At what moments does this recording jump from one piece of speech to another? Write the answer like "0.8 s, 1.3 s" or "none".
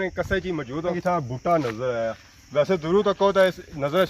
1.0 s